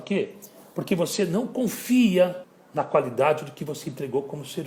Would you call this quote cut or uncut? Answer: uncut